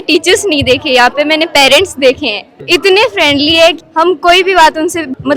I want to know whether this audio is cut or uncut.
uncut